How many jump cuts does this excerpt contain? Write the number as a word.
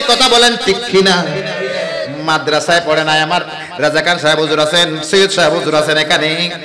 zero